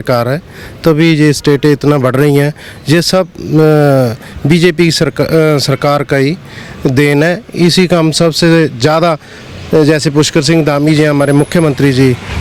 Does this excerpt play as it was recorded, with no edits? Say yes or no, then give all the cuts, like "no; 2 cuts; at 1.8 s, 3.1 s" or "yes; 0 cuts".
yes; 0 cuts